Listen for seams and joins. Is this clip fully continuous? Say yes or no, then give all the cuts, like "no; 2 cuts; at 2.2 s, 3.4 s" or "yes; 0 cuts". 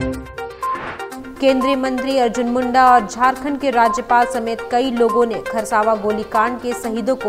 yes; 0 cuts